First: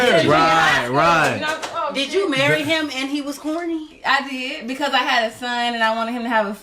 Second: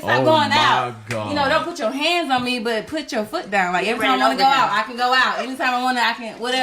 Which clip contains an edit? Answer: second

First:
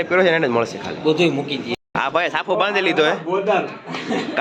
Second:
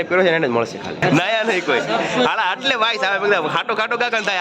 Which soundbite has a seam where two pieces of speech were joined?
second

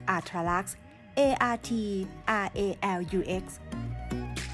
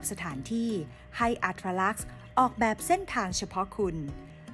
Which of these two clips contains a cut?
first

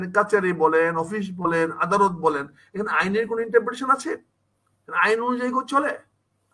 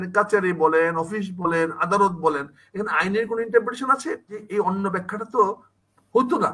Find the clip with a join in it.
second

